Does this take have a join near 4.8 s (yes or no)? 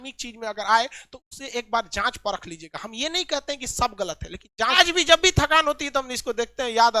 yes